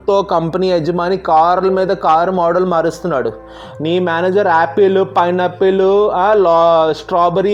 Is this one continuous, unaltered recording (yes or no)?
yes